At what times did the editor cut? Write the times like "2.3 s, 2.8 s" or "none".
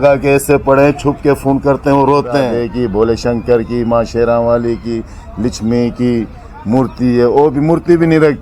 2.6 s